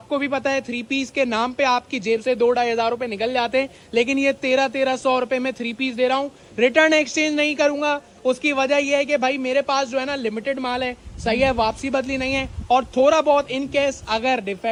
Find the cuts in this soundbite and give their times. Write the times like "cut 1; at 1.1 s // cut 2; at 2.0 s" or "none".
none